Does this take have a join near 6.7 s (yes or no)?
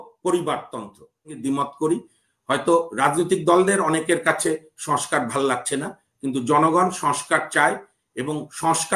no